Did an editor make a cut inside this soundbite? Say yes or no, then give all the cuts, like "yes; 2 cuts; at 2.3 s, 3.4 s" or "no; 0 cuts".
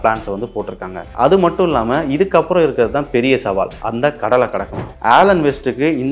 yes; 2 cuts; at 1.0 s, 4.8 s